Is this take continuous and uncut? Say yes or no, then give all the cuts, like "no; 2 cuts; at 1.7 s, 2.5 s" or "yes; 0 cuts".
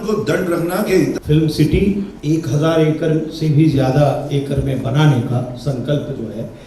no; 2 cuts; at 1.2 s, 2.1 s